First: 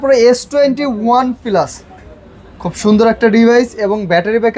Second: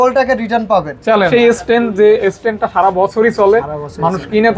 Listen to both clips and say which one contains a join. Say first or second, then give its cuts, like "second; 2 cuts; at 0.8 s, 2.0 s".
second; 1 cut; at 1.3 s